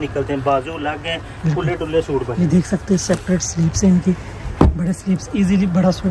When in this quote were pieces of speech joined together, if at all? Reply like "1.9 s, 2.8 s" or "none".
none